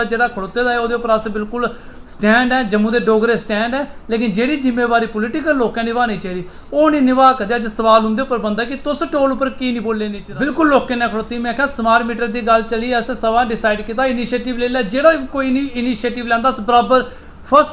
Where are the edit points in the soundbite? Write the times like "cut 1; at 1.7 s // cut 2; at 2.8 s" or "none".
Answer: cut 1; at 10.2 s